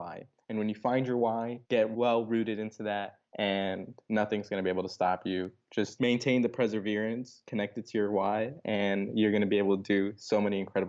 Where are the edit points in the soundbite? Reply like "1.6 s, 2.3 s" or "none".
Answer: 1.9 s, 3.2 s, 5.9 s